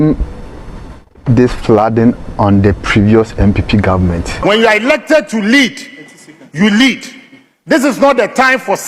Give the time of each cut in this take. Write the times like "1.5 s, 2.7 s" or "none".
4.3 s